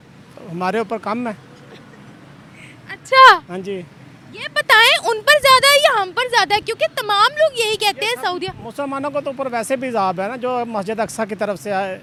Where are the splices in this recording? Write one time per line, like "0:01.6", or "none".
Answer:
none